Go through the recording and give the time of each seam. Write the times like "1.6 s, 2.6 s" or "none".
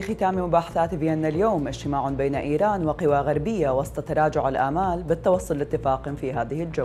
none